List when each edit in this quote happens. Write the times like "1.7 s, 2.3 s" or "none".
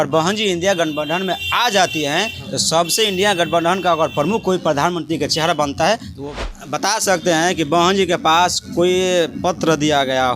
6.2 s

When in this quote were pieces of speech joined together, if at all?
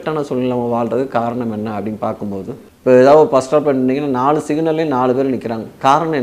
2.6 s

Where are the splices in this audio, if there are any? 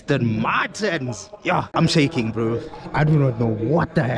1.7 s

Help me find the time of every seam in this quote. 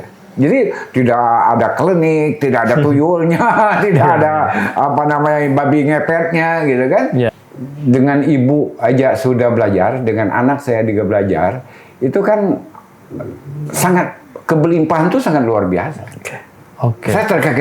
7.3 s

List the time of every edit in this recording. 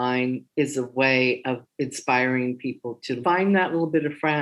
3.2 s

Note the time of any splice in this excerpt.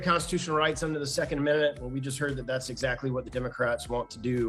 none

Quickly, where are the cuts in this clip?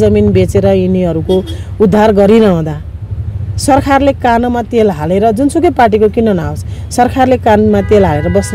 none

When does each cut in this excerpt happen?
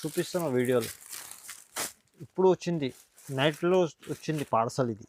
none

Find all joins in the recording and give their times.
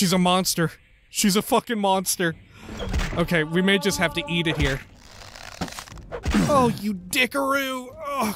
none

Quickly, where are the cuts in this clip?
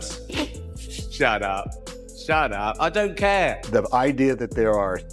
3.6 s

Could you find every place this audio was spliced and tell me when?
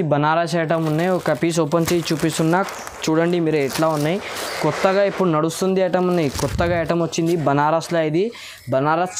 none

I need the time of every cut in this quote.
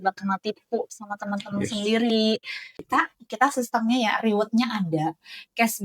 2.7 s

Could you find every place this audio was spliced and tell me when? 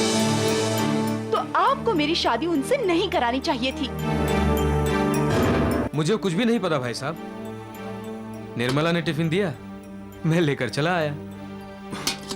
5.9 s

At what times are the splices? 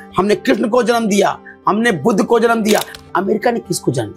3.0 s

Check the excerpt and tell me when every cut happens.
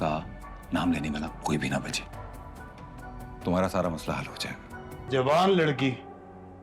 4.9 s

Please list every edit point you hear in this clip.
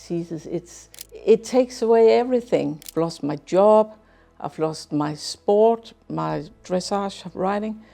1.1 s, 2.8 s

